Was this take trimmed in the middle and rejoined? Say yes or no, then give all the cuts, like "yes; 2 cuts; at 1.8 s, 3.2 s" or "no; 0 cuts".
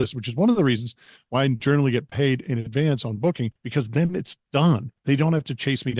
yes; 2 cuts; at 3.6 s, 4.9 s